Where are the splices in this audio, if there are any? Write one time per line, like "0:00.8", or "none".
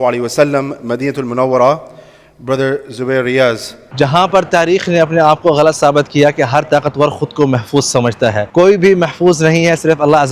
0:03.9
0:08.4